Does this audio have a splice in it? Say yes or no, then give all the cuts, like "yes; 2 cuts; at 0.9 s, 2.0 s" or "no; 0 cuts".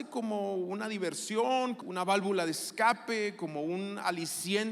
yes; 1 cut; at 1.8 s